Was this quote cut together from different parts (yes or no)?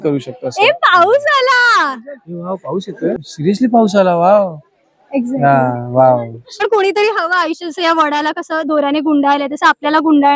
yes